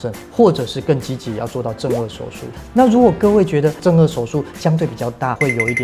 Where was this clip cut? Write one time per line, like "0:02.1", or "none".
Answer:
0:02.6
0:03.8